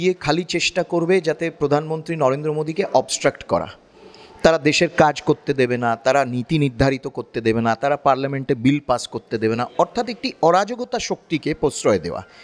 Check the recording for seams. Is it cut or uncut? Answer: uncut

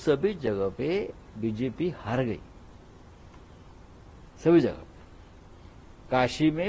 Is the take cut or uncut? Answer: uncut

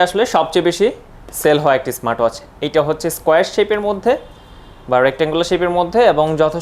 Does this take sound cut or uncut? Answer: uncut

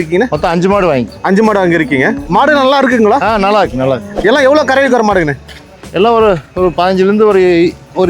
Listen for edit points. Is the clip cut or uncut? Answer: cut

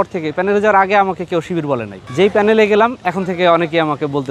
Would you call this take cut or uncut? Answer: uncut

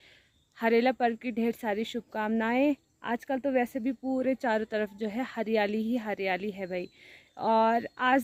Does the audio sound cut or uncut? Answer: uncut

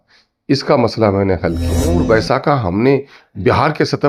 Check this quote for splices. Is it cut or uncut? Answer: cut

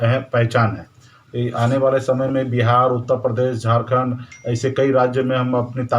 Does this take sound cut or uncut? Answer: cut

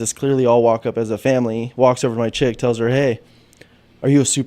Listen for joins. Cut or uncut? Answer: uncut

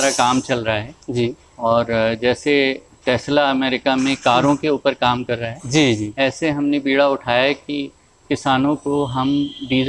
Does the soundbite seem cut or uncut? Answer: uncut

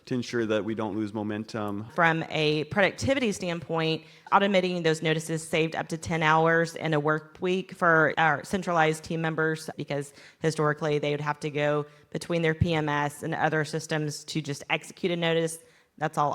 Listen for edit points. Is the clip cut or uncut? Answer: cut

